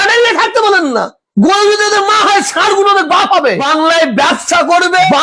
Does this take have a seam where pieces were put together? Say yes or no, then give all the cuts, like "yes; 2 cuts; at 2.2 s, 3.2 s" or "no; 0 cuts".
yes; 1 cut; at 3.7 s